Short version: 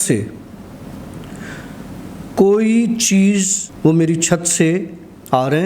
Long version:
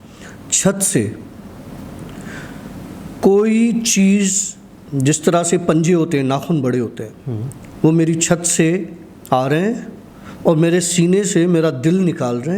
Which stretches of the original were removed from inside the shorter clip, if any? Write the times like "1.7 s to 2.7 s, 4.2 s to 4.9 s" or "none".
4.5 s to 7.6 s